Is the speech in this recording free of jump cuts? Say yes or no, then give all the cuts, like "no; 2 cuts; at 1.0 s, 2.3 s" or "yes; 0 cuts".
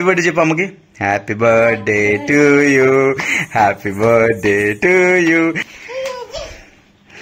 no; 1 cut; at 5.7 s